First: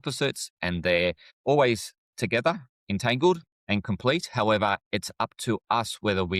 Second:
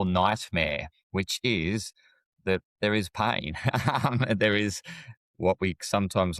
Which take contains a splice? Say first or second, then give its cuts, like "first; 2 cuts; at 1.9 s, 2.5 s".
first; 2 cuts; at 1.3 s, 3.5 s